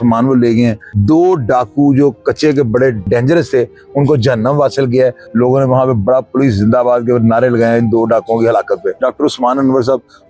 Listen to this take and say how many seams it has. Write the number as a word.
four